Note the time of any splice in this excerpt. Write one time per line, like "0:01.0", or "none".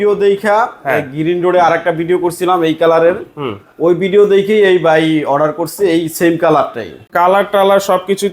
0:06.9